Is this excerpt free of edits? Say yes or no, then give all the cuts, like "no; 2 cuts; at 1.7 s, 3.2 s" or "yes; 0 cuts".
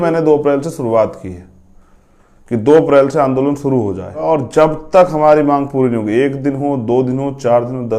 no; 1 cut; at 4.2 s